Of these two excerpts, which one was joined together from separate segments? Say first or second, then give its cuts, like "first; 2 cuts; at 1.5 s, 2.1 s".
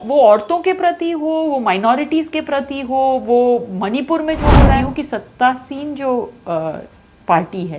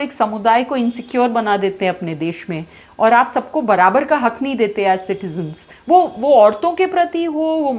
first; 1 cut; at 4.7 s